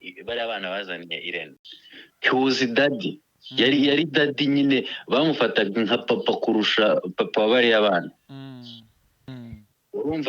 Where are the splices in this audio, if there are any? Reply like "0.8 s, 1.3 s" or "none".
1.5 s, 9.3 s

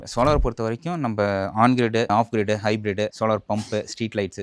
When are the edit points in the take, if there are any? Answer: none

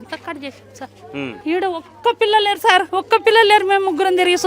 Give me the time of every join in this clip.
1.4 s, 2.9 s

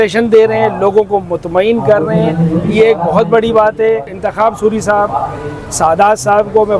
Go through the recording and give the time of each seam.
4.2 s

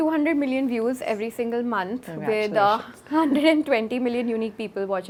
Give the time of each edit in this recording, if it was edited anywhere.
none

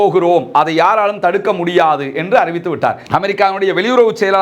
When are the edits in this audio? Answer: 3.0 s

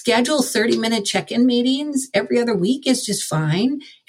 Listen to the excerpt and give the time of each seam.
none

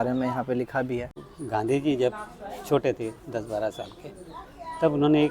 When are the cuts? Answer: 1.3 s

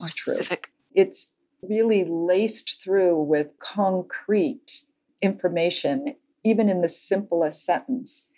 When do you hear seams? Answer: 0.9 s, 3.6 s

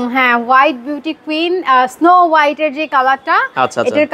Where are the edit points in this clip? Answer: none

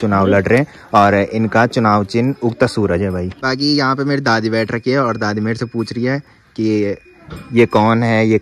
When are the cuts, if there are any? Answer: none

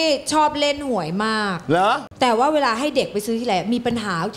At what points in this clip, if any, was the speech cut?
2.1 s

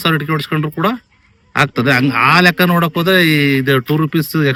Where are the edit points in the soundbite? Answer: none

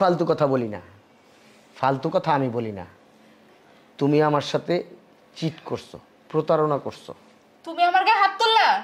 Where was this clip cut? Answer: none

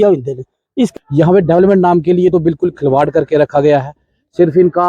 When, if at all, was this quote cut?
0.9 s

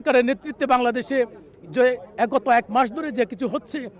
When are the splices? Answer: none

